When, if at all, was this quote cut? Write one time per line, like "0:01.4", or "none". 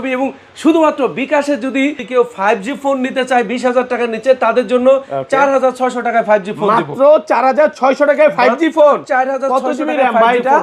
0:02.0